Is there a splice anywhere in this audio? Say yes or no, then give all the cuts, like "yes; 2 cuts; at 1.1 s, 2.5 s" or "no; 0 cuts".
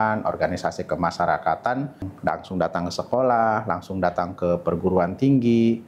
yes; 1 cut; at 2.1 s